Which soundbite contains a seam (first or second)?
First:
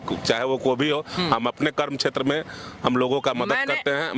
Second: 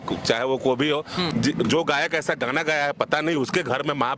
second